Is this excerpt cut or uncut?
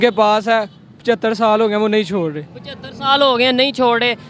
uncut